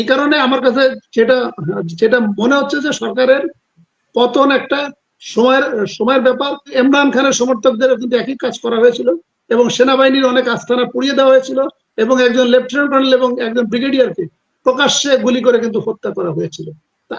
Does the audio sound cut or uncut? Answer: cut